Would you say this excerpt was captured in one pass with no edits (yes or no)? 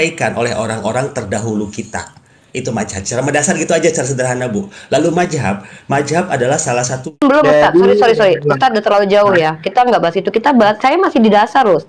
no